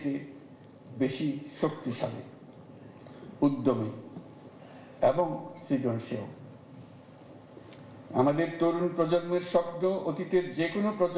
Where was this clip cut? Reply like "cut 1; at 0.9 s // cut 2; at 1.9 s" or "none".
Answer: none

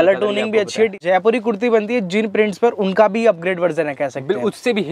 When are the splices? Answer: cut 1; at 1.0 s

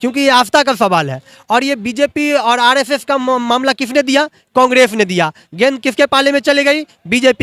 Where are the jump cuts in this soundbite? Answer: none

